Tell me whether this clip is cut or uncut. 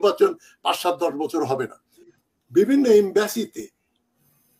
cut